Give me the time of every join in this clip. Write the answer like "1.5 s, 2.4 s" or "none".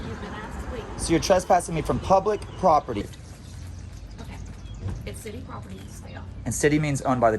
3.0 s